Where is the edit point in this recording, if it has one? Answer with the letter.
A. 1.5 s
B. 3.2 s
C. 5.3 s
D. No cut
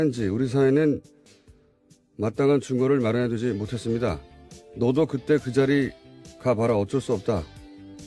B